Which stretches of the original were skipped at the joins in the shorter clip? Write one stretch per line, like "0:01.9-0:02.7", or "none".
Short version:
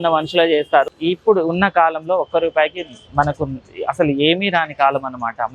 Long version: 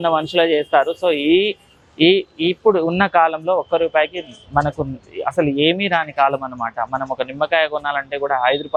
0:00.9-0:02.3